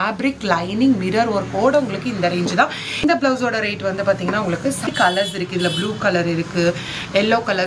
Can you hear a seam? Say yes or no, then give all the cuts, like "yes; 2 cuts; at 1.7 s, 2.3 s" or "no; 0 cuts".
yes; 2 cuts; at 3.0 s, 4.9 s